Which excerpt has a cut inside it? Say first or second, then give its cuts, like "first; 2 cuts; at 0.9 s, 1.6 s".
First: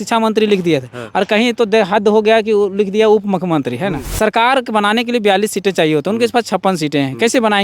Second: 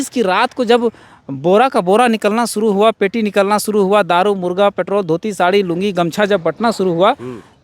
first; 1 cut; at 4.0 s